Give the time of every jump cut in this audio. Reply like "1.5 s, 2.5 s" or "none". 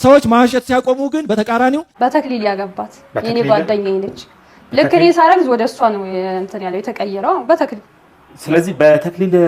1.9 s